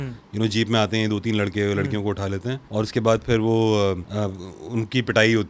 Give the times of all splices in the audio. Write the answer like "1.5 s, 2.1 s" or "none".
2.6 s, 4.1 s